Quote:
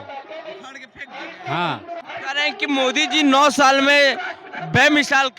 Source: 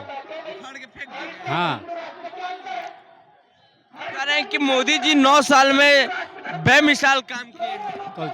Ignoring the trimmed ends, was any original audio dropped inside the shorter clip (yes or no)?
yes